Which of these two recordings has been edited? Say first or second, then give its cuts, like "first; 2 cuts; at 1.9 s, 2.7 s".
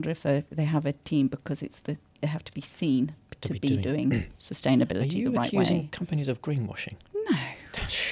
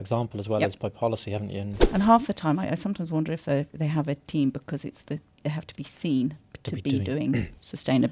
second; 1 cut; at 1.8 s